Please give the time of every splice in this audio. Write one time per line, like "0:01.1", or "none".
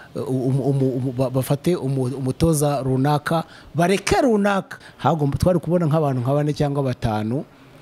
0:04.8